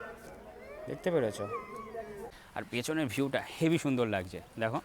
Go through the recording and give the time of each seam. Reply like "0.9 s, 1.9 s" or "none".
2.3 s